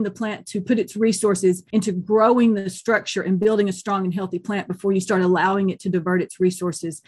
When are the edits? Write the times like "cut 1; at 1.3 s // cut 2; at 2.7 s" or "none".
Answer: cut 1; at 1.6 s